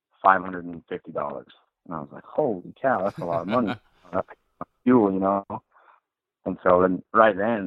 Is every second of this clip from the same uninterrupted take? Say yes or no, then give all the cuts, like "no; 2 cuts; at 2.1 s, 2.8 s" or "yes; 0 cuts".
yes; 0 cuts